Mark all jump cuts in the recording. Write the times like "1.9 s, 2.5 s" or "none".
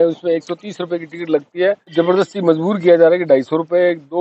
1.9 s